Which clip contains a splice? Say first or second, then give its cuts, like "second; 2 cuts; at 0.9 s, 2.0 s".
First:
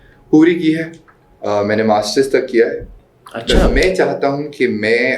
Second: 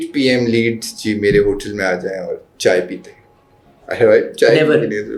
first; 1 cut; at 3.6 s